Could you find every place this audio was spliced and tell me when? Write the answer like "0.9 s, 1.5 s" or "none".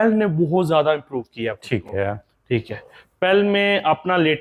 none